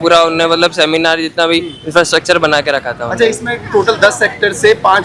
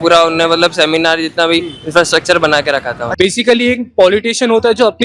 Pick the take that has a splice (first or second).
second